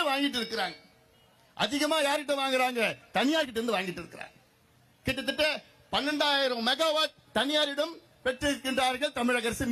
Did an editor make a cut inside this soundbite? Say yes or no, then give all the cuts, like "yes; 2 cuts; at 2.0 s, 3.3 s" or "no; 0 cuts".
no; 0 cuts